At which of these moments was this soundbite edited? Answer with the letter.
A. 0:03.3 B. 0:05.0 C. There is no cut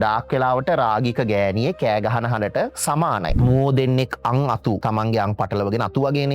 A